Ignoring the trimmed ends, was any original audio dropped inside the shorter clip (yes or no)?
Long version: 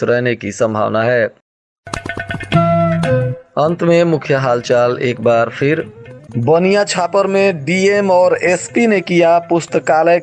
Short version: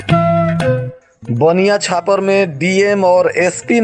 yes